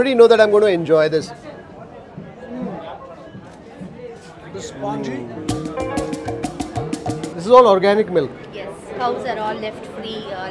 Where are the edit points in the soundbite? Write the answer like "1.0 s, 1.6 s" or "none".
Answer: 7.3 s, 8.9 s